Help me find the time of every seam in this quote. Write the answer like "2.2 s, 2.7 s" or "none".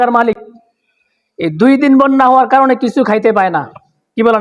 none